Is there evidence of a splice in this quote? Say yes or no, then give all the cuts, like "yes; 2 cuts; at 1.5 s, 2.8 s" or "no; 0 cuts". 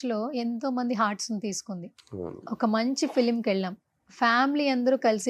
no; 0 cuts